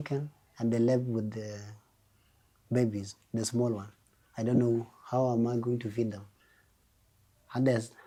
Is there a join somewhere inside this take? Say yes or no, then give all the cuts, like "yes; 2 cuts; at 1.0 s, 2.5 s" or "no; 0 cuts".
no; 0 cuts